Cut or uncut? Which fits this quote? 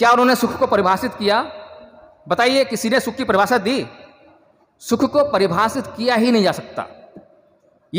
uncut